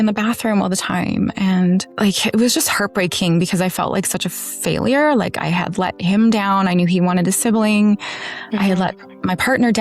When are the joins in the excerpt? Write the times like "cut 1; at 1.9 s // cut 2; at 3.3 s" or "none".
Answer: cut 1; at 1.9 s